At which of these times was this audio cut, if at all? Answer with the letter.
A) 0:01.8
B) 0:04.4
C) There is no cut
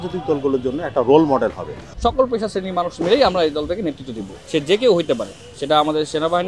A